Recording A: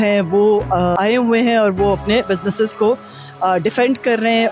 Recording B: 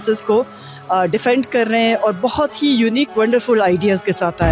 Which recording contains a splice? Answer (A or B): A